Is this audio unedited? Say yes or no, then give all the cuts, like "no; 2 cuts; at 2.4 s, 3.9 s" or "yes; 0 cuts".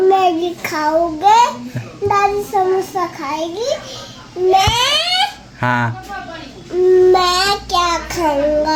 yes; 0 cuts